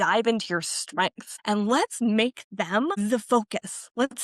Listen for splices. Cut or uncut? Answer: cut